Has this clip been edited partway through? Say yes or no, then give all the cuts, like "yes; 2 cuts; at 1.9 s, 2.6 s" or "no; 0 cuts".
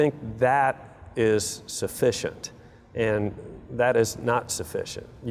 no; 0 cuts